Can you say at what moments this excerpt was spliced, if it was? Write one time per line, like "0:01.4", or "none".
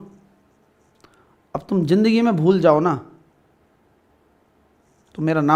none